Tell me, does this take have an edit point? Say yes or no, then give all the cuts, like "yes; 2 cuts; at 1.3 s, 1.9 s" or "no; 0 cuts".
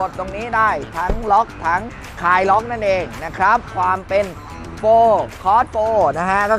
yes; 1 cut; at 3.7 s